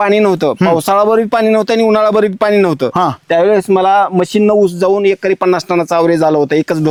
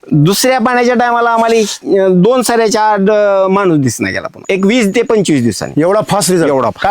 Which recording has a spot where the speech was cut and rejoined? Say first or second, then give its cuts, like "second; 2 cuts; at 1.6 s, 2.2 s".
second; 1 cut; at 4.4 s